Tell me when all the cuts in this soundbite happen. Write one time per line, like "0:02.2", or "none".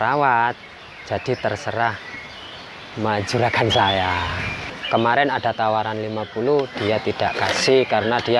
0:04.7